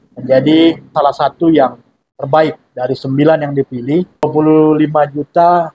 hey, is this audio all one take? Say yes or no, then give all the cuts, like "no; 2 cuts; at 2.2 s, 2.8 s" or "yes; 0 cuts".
no; 2 cuts; at 0.9 s, 4.2 s